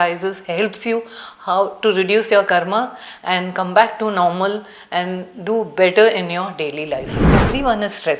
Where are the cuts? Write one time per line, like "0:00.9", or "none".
0:07.1